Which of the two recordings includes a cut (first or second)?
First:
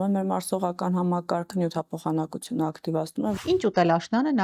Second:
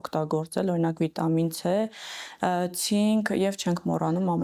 first